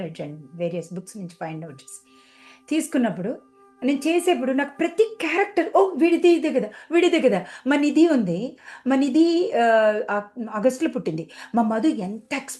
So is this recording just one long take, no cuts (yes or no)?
yes